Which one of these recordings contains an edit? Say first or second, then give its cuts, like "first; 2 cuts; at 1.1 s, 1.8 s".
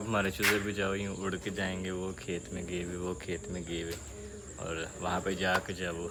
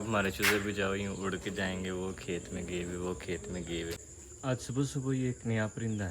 second; 1 cut; at 4.1 s